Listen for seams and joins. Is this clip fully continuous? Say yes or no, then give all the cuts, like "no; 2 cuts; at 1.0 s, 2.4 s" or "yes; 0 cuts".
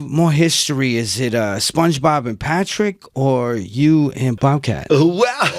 no; 1 cut; at 4.3 s